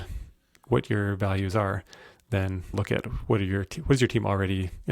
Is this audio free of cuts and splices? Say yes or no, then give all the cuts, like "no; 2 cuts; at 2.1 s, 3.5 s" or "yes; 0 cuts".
no; 1 cut; at 2.7 s